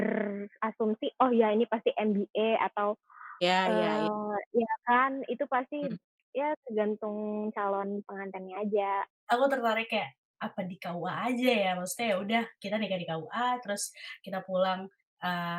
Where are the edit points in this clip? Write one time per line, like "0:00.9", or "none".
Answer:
0:09.2